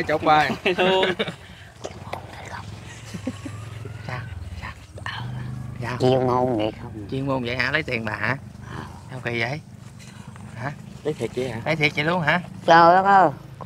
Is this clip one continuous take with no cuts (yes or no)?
yes